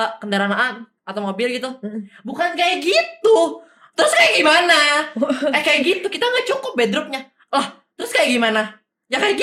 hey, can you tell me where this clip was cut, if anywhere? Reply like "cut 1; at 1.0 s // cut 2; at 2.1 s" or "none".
none